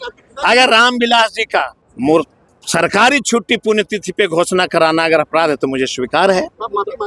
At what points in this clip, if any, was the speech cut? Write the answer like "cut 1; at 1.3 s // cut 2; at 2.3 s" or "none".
cut 1; at 1.8 s